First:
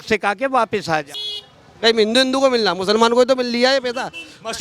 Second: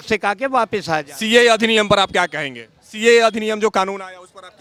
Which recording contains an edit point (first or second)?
first